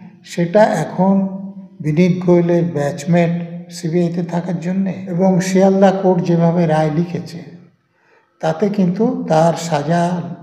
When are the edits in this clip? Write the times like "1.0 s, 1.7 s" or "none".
5.0 s